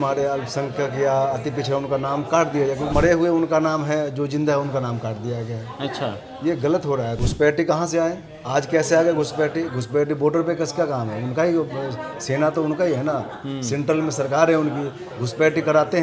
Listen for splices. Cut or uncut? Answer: cut